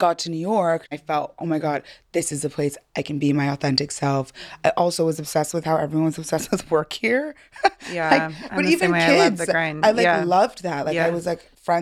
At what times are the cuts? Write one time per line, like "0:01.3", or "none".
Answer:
0:00.9